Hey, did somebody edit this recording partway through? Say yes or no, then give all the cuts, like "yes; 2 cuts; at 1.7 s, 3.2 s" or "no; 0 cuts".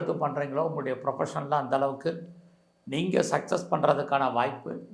no; 0 cuts